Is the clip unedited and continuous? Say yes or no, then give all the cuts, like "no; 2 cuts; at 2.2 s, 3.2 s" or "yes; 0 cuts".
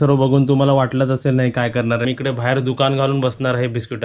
no; 1 cut; at 2.1 s